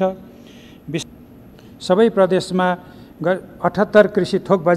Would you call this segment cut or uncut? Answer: cut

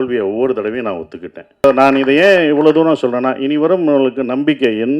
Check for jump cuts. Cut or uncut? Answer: cut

